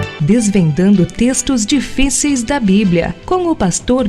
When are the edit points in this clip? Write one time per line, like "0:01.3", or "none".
none